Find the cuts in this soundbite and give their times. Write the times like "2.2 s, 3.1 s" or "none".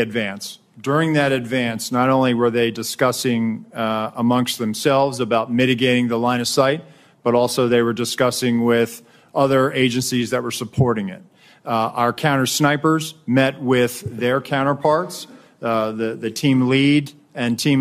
none